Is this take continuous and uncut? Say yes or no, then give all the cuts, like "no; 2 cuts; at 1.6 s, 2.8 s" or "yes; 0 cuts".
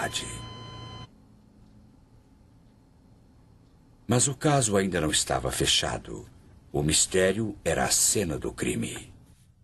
yes; 0 cuts